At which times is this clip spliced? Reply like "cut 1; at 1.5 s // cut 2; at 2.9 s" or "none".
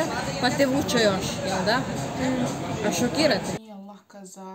cut 1; at 3.6 s